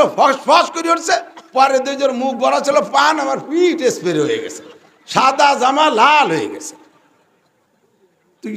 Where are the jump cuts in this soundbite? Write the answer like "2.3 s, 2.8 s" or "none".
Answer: none

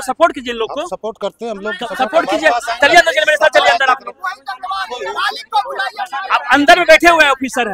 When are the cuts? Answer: none

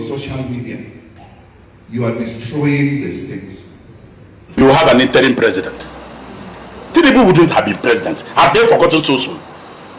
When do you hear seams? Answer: 4.6 s

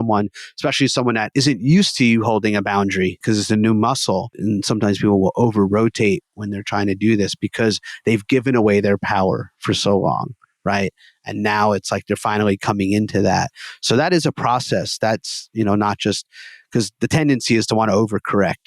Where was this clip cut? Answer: 1.3 s, 3.2 s, 4.3 s

